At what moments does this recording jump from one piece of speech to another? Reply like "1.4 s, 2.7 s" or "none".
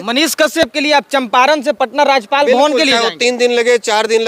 none